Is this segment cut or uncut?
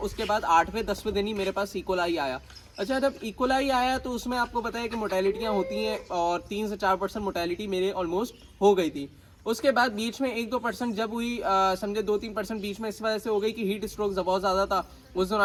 uncut